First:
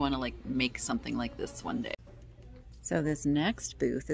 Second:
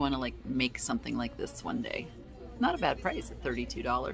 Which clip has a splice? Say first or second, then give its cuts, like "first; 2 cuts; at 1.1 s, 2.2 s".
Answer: first; 1 cut; at 1.9 s